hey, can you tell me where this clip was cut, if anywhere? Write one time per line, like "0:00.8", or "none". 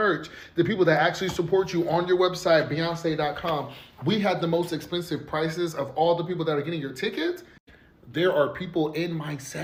none